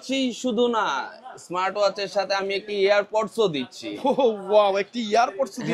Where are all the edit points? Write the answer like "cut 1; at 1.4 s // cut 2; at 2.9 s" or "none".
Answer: none